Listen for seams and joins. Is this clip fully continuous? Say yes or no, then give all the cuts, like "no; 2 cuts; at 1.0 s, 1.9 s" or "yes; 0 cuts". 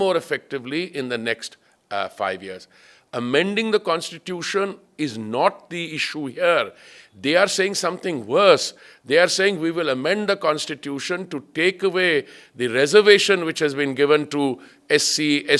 yes; 0 cuts